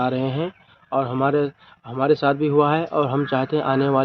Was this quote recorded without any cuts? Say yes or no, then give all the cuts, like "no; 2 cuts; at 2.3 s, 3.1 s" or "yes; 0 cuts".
yes; 0 cuts